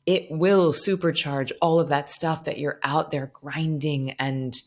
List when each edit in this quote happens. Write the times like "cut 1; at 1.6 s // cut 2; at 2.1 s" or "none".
none